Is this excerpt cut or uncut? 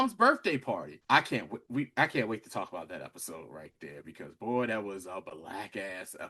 cut